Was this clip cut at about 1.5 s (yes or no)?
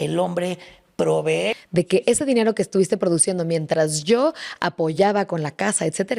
yes